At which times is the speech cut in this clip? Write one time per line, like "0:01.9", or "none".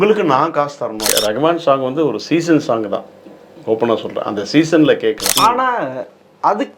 0:01.1
0:05.3